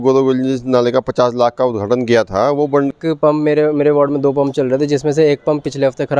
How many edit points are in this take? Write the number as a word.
one